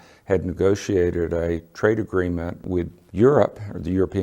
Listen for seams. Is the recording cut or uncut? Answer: cut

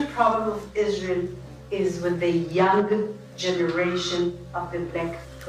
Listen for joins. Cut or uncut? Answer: uncut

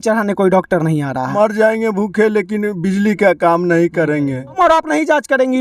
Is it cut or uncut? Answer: cut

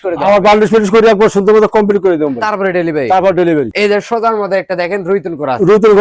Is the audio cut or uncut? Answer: cut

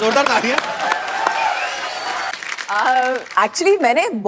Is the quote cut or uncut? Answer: cut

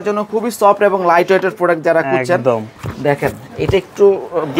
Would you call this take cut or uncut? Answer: uncut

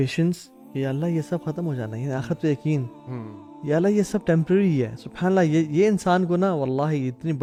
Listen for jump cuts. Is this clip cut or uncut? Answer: uncut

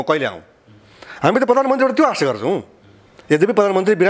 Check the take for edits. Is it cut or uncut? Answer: uncut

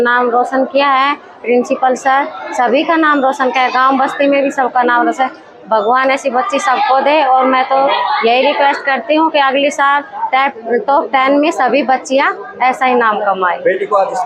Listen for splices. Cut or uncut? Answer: uncut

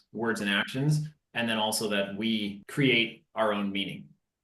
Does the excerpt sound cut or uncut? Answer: cut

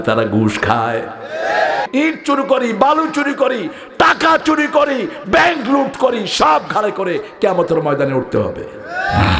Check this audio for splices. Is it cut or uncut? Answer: cut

